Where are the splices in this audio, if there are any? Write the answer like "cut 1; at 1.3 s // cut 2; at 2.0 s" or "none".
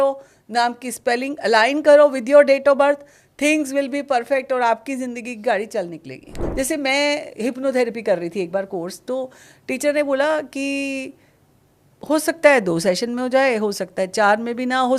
cut 1; at 6.4 s